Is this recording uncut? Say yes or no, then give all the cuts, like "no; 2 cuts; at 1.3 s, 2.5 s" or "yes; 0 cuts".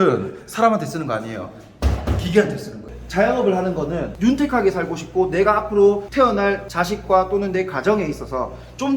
no; 1 cut; at 2.7 s